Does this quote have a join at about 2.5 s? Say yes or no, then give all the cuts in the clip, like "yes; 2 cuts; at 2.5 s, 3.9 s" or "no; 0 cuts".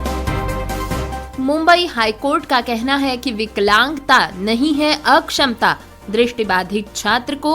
no; 1 cut; at 1.0 s